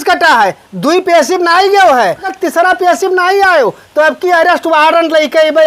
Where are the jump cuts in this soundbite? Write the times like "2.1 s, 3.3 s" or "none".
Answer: 2.3 s